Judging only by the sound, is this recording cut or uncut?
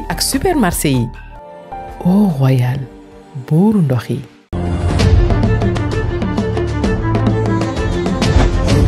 uncut